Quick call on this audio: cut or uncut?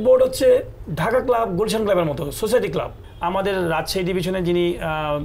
cut